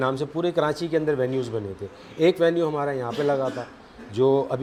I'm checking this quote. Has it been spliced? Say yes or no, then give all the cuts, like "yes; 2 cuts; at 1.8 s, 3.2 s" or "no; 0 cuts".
no; 0 cuts